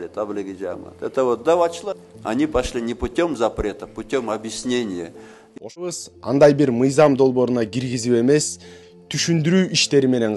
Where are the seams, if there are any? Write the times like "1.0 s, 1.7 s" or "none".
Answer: 5.8 s